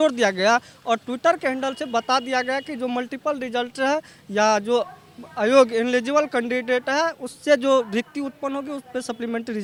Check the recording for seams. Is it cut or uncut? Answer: uncut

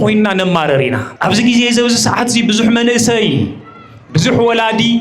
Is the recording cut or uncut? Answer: cut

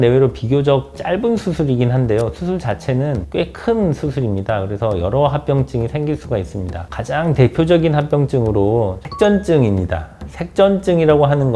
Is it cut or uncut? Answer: cut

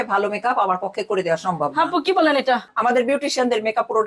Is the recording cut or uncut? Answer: cut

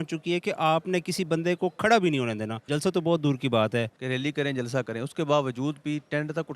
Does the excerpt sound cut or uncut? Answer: cut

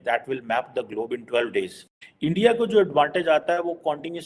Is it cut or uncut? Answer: cut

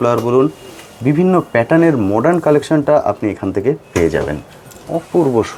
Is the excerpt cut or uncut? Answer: uncut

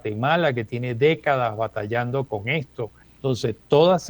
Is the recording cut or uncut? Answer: cut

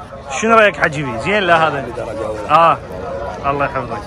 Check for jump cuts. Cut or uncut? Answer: uncut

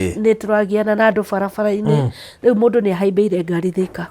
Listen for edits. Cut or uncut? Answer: cut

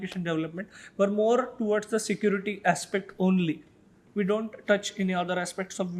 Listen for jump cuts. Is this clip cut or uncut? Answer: uncut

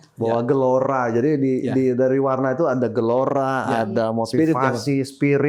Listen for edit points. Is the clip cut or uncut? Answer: uncut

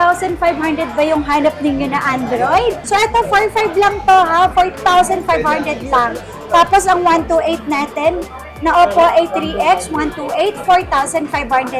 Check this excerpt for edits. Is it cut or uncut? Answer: cut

